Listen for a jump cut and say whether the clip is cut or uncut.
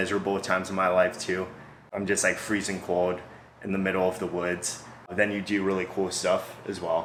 uncut